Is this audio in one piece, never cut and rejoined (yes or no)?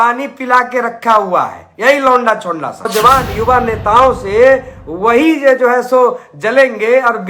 no